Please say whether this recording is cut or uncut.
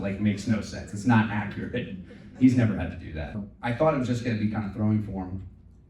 cut